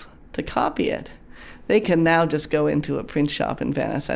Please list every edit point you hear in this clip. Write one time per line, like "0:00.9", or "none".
0:01.8